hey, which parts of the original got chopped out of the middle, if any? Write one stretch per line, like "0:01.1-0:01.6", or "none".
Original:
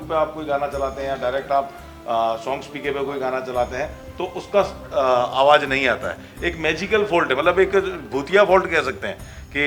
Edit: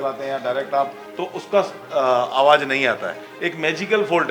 0:01.8-0:04.0